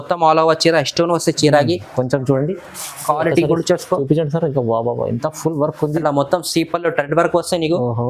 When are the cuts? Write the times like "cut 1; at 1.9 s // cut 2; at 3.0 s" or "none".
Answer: cut 1; at 6.0 s